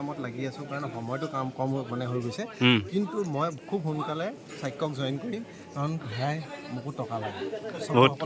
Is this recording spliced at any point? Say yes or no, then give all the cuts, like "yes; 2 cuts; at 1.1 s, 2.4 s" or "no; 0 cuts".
no; 0 cuts